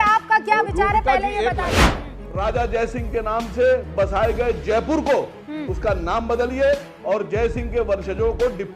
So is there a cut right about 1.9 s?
yes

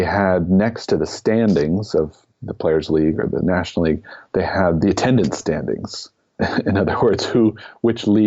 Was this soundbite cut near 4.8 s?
yes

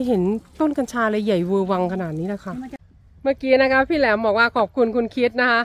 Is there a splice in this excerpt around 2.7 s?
yes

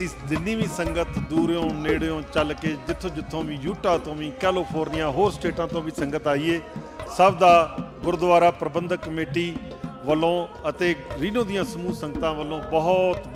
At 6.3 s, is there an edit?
no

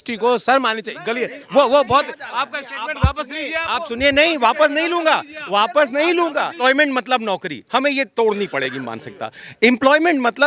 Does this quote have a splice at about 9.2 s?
no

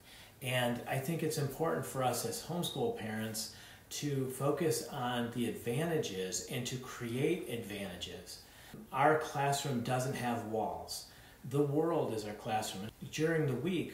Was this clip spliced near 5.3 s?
no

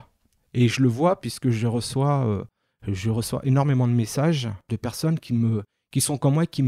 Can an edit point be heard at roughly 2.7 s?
no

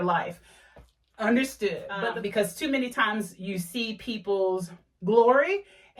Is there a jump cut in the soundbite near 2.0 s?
yes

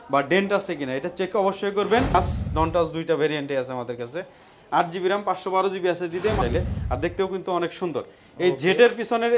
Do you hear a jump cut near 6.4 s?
yes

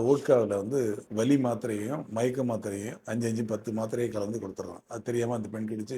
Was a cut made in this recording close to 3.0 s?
no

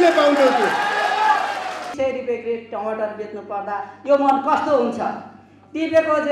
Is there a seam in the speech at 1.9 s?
yes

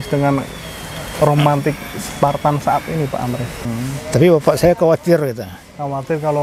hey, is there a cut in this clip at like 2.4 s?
no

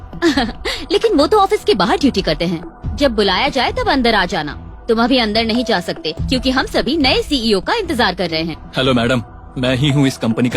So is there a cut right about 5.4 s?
no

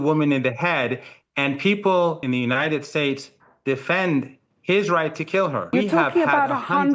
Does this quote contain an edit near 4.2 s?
no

